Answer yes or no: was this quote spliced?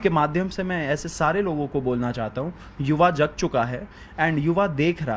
no